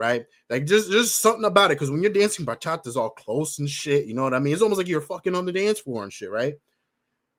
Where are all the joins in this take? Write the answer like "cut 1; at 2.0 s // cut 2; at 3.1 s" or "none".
none